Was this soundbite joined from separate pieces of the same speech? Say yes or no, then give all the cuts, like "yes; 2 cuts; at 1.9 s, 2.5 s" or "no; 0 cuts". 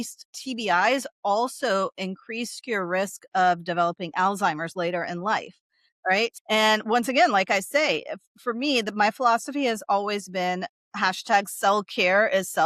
yes; 1 cut; at 6.4 s